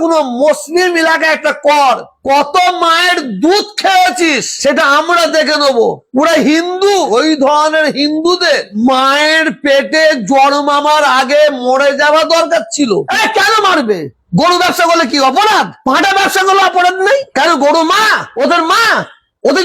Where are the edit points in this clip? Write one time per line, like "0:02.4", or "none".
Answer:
0:07.1
0:13.1
0:17.3